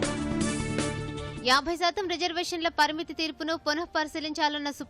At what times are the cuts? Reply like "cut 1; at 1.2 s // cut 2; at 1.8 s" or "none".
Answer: none